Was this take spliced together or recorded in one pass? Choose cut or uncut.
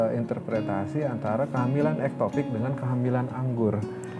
uncut